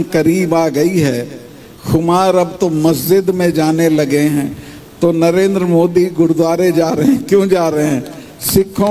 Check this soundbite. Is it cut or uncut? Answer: uncut